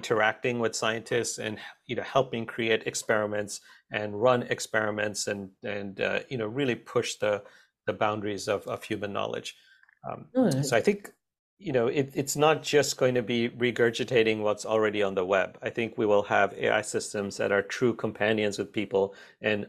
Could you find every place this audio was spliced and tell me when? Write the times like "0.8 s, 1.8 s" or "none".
none